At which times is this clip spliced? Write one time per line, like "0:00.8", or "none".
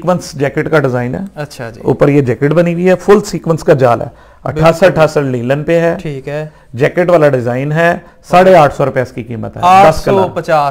none